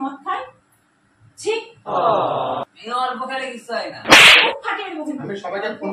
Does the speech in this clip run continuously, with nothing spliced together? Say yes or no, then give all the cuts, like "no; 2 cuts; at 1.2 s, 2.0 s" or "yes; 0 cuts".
yes; 0 cuts